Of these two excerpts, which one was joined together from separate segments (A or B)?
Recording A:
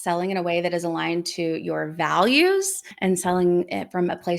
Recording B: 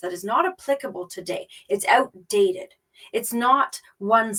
A